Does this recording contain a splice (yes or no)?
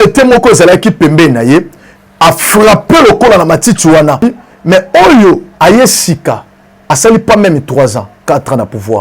yes